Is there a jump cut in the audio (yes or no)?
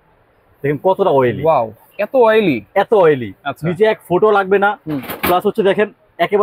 no